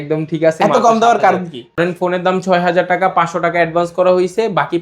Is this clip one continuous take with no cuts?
no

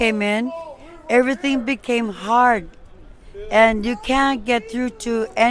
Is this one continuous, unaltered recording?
yes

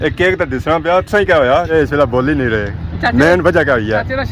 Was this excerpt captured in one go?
no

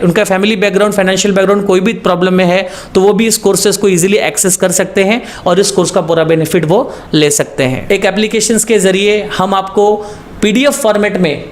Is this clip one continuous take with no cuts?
no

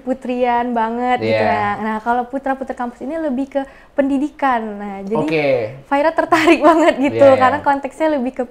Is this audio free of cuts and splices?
yes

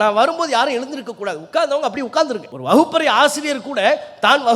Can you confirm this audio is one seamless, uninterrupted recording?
no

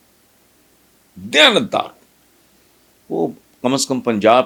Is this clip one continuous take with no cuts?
yes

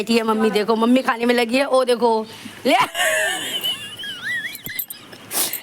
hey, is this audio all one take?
yes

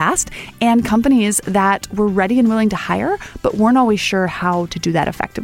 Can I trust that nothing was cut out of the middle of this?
yes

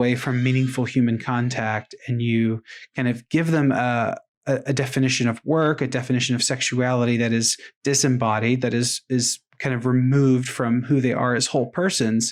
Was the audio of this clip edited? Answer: no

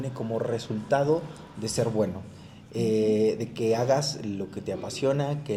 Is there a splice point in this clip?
no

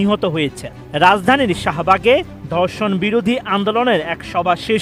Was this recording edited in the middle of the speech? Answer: no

